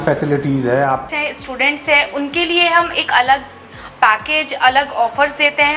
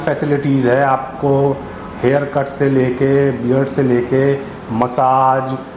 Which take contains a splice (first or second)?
first